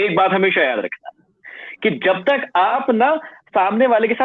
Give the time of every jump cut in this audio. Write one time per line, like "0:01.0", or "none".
0:02.7